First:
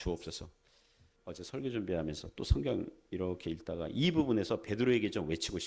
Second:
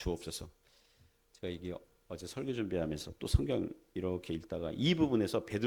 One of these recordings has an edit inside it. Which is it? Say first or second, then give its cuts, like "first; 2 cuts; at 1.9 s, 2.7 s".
first; 1 cut; at 1.1 s